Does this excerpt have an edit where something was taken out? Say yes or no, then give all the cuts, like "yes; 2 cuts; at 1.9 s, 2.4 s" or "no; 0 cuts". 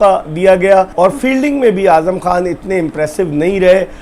yes; 1 cut; at 0.9 s